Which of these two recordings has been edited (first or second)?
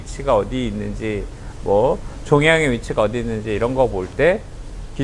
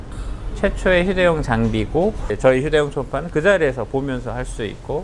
second